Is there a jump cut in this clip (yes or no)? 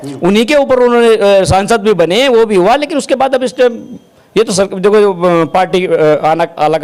no